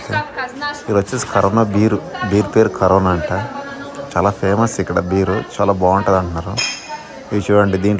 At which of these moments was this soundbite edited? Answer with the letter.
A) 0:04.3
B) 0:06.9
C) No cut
C